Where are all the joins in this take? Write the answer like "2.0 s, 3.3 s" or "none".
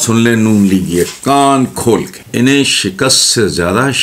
1.2 s, 2.2 s